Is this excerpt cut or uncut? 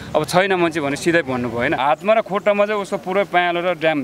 cut